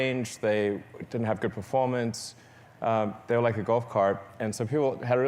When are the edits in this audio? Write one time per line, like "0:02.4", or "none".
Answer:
none